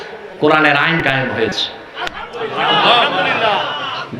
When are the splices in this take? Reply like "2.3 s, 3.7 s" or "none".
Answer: 1.3 s